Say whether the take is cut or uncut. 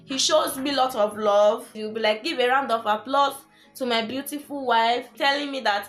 cut